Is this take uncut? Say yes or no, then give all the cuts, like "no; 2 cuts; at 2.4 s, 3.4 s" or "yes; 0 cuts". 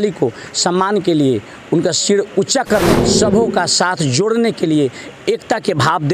no; 1 cut; at 3.0 s